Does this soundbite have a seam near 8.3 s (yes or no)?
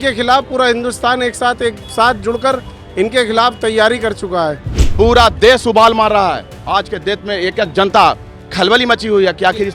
no